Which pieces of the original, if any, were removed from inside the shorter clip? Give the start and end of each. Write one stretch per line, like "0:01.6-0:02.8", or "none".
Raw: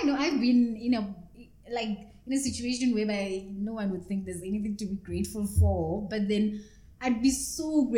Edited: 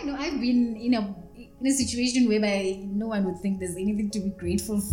0:01.5-0:02.1